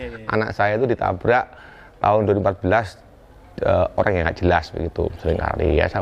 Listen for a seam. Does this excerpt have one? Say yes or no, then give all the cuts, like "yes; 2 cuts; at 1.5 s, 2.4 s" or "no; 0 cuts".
no; 0 cuts